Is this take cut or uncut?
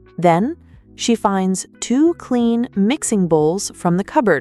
uncut